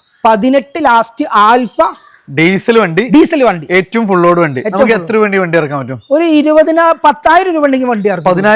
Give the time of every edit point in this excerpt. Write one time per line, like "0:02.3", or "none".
none